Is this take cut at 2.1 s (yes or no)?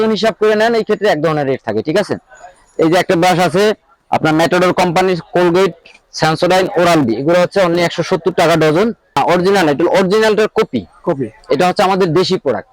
no